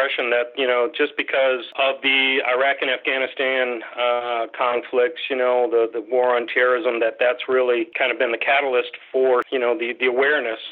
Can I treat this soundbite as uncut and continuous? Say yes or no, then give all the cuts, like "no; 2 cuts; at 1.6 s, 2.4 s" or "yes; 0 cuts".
no; 3 cuts; at 1.7 s, 7.9 s, 9.5 s